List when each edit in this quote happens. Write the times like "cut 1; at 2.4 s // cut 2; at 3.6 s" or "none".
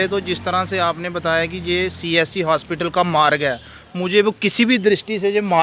none